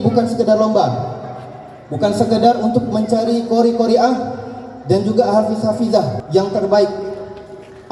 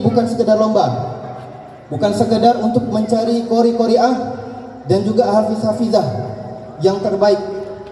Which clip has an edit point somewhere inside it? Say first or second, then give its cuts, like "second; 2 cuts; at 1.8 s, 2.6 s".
first; 1 cut; at 6.2 s